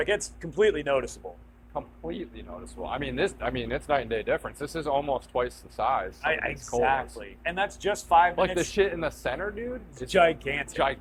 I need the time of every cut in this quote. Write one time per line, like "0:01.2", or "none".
none